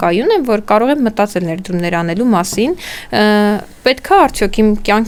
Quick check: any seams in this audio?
no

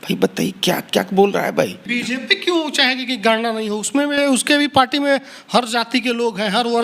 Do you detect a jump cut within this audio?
yes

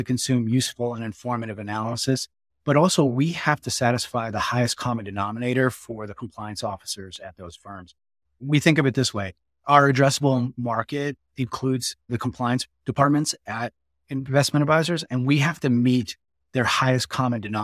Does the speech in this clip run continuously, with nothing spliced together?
no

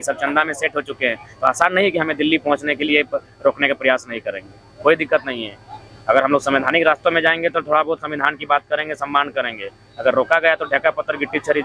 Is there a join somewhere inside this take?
no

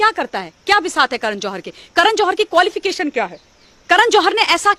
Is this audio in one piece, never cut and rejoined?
yes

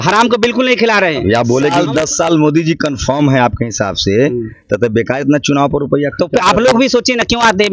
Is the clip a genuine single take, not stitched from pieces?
no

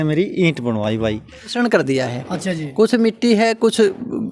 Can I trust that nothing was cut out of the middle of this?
no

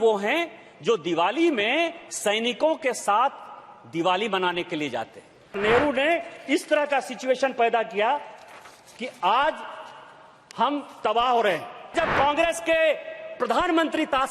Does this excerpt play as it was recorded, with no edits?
no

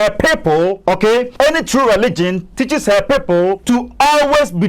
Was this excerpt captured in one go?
no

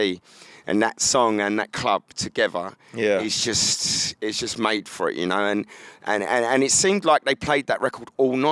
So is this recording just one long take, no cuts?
yes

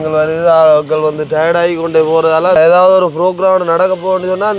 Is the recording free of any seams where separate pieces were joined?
no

